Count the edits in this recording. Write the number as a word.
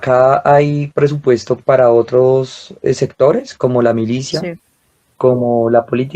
one